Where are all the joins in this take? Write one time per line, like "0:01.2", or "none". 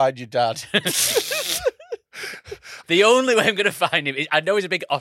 0:02.7